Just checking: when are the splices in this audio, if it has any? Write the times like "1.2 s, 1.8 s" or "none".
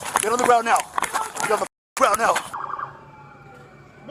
2.5 s